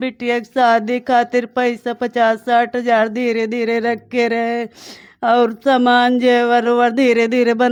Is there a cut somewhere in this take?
no; 0 cuts

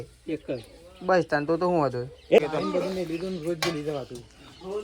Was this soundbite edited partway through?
yes; 1 cut; at 2.4 s

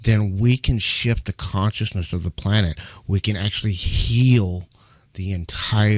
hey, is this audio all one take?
yes; 0 cuts

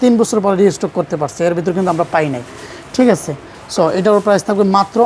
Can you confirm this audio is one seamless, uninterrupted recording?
yes; 0 cuts

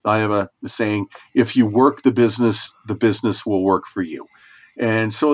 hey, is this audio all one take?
yes; 0 cuts

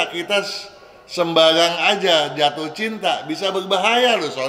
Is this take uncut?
yes; 0 cuts

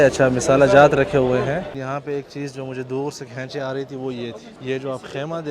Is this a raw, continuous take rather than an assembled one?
no; 2 cuts; at 1.7 s, 4.5 s

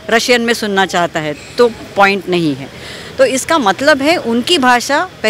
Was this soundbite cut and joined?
no; 0 cuts

